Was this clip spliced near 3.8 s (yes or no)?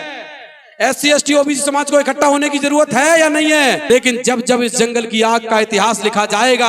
yes